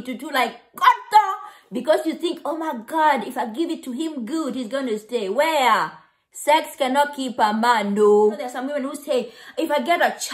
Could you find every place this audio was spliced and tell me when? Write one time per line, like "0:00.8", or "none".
0:08.5